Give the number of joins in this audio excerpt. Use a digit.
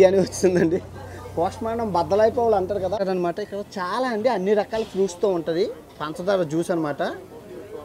1